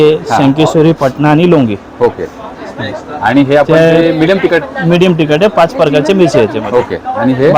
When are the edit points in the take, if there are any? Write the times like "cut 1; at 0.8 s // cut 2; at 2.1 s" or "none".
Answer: none